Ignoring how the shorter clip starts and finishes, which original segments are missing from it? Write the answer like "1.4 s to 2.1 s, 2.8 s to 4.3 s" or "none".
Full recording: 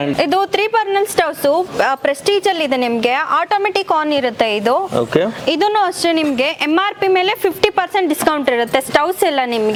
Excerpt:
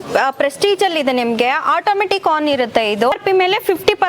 4.8 s to 6.9 s